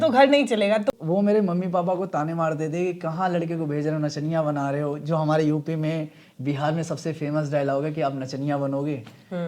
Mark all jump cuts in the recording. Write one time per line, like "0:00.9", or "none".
0:00.9